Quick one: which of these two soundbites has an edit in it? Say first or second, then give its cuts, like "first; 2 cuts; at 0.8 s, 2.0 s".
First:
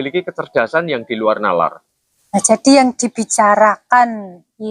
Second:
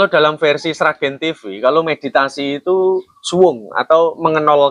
first; 1 cut; at 2.1 s